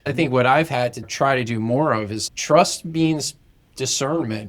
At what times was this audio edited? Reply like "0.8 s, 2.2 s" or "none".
1.0 s, 2.2 s